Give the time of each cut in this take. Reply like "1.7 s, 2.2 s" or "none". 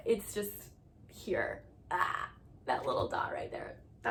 none